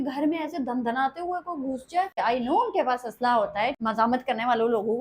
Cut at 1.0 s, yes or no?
no